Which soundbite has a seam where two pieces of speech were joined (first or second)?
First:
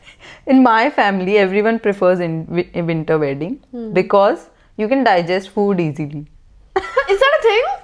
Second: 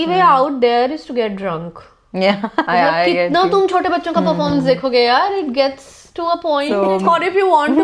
second